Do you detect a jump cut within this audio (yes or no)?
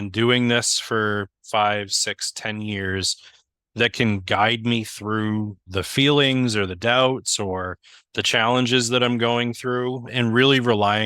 yes